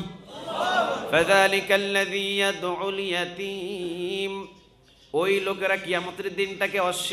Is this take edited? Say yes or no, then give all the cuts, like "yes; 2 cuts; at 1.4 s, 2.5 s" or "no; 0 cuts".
no; 0 cuts